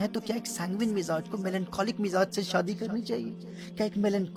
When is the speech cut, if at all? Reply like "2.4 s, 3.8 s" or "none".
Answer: none